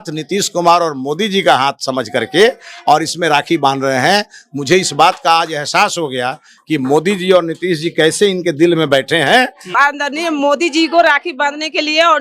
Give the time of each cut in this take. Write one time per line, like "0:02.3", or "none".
0:09.6